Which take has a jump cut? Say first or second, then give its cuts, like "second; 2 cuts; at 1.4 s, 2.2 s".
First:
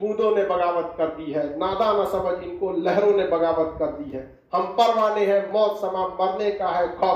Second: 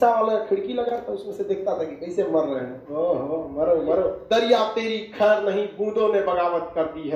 second; 1 cut; at 4.2 s